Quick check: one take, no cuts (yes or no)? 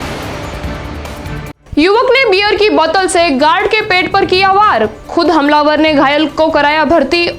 no